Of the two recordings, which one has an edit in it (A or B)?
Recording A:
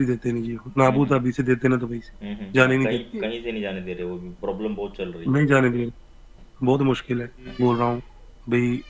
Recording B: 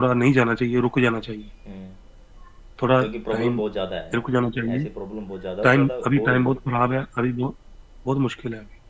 A